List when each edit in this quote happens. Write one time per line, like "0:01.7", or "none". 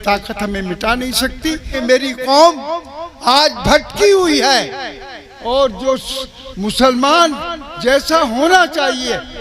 0:01.7